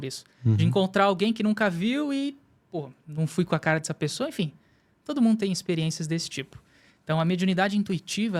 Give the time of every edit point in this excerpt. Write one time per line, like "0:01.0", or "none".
none